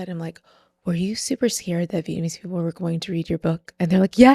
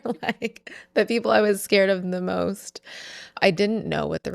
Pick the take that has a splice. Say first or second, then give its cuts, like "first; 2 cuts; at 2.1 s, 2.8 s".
second; 1 cut; at 3.4 s